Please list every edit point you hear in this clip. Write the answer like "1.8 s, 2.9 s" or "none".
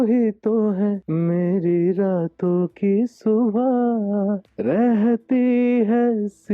1.0 s, 4.5 s